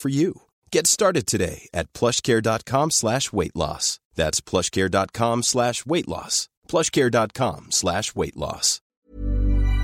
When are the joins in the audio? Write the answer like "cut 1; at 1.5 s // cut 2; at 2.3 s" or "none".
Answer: cut 1; at 8.8 s